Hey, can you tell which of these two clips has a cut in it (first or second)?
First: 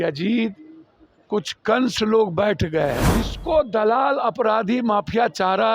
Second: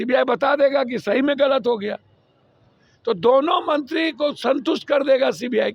first